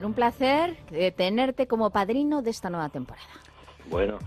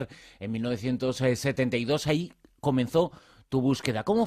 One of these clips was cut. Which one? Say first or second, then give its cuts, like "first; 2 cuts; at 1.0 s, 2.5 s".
second; 1 cut; at 1.4 s